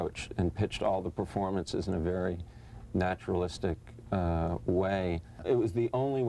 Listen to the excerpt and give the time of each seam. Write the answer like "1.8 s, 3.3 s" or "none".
5.3 s